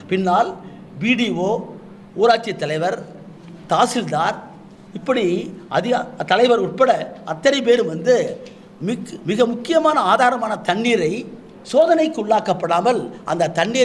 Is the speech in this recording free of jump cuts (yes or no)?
yes